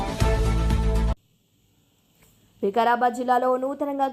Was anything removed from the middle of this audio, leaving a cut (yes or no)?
no